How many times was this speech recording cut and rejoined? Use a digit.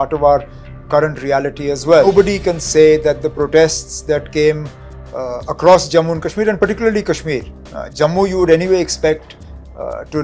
1